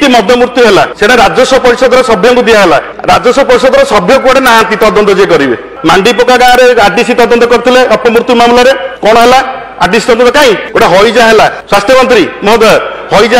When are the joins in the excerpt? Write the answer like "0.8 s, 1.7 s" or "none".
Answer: 0.9 s, 2.9 s, 5.7 s, 8.9 s, 10.6 s, 11.6 s